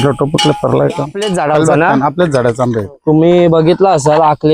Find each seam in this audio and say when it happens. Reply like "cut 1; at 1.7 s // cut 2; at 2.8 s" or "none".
cut 1; at 1.2 s